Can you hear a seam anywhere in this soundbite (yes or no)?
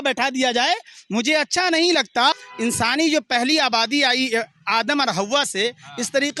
yes